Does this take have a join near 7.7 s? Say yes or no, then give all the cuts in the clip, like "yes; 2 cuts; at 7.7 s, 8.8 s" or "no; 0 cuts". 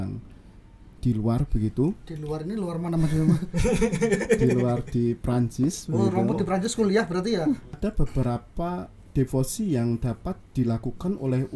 yes; 1 cut; at 7.7 s